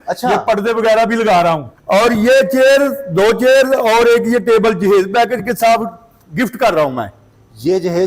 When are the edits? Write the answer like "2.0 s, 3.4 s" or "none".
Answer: 1.7 s